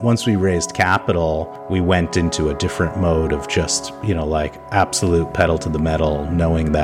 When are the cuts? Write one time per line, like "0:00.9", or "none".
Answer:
none